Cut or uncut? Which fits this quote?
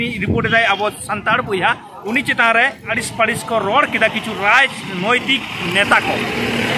cut